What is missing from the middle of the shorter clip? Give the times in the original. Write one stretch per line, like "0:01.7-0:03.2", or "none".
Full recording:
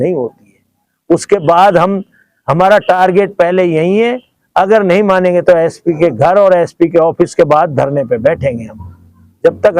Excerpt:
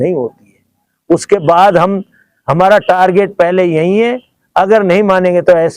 none